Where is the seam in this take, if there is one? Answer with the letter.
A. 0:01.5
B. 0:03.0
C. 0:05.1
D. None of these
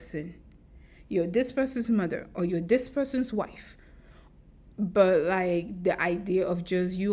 D